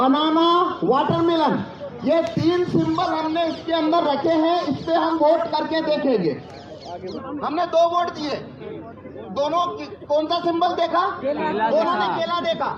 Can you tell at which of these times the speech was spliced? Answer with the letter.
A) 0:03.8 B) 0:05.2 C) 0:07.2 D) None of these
C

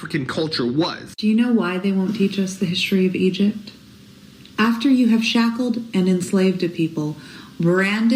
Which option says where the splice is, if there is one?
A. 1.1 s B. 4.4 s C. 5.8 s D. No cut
A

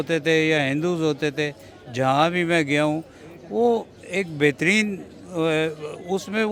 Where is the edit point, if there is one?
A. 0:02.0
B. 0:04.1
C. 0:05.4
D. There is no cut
D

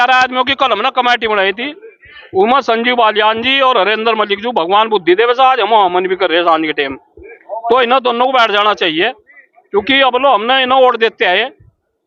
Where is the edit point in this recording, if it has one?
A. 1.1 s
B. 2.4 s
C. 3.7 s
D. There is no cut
D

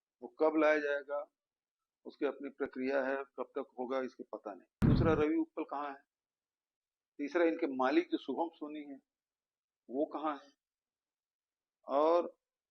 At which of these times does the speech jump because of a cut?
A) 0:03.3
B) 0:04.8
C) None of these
B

